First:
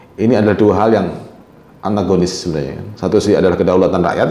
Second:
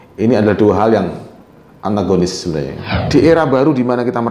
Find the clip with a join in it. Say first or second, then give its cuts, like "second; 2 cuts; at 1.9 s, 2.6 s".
second; 1 cut; at 2.8 s